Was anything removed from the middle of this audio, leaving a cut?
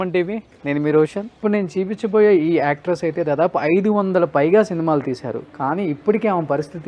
yes; 1 cut; at 1.3 s

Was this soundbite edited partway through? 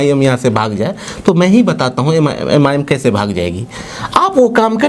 no; 0 cuts

